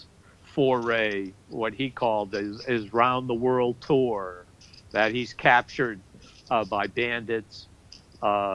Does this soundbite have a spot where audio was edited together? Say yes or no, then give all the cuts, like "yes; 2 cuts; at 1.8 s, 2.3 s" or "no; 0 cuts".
no; 0 cuts